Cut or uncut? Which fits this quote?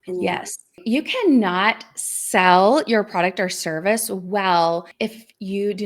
cut